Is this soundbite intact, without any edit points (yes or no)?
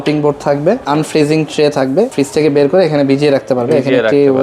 no